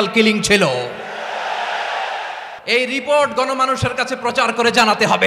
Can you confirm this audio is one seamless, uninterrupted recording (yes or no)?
no